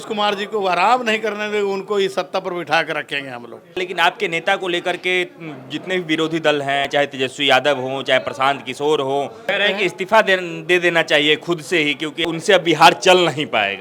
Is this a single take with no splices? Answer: no; 4 cuts; at 3.8 s, 6.9 s, 9.5 s, 12.2 s

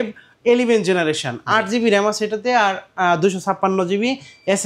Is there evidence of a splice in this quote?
no; 0 cuts

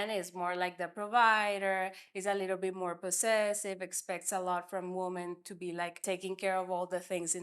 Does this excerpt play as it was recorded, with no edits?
no; 1 cut; at 6.0 s

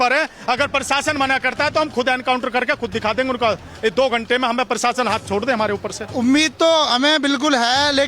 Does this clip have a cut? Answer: yes; 1 cut; at 6.1 s

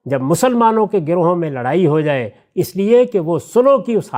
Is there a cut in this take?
no; 0 cuts

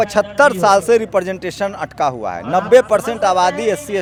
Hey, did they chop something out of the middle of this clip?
no; 0 cuts

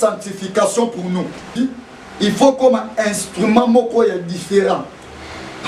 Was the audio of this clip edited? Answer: yes; 1 cut; at 1.5 s

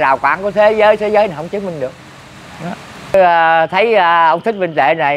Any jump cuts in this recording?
yes; 1 cut; at 3.1 s

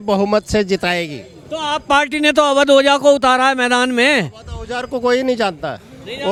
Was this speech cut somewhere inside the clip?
no; 0 cuts

